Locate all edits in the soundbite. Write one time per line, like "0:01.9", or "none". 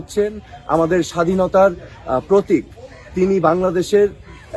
none